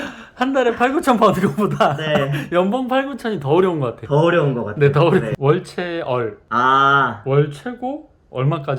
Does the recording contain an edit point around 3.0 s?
no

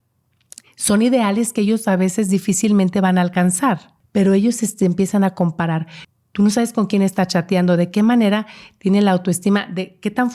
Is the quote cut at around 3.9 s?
yes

